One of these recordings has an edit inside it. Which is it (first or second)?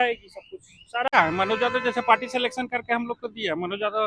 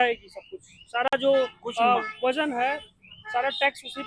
first